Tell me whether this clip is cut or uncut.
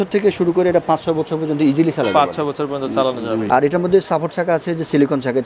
cut